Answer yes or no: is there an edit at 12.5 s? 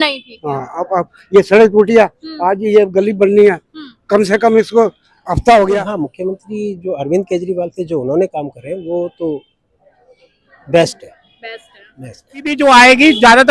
yes